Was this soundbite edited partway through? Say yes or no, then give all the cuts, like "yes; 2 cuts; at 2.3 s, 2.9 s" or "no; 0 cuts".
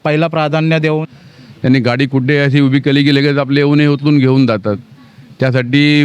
yes; 1 cut; at 1.0 s